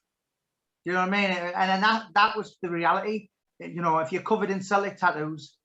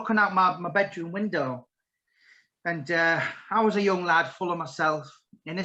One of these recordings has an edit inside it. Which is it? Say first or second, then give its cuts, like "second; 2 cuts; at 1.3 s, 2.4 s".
first; 1 cut; at 3.4 s